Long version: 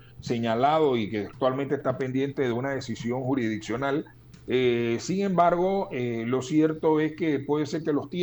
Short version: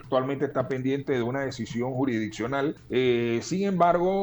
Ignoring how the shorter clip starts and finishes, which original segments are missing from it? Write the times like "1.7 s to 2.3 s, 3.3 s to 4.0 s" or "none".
4.1 s to 4.4 s